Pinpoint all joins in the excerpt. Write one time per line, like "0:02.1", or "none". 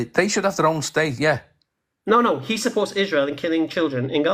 none

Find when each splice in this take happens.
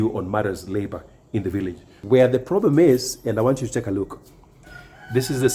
0:02.0

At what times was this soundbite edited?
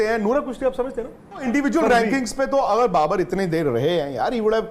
0:01.5

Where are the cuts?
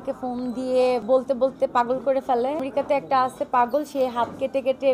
0:01.0
0:02.7

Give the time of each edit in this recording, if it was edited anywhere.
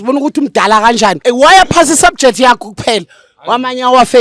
0:01.2

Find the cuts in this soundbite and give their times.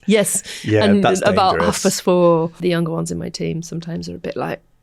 0:02.5

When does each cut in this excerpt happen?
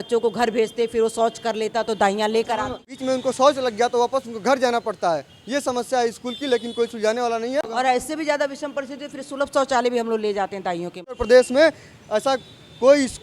0:03.0
0:07.6
0:11.2

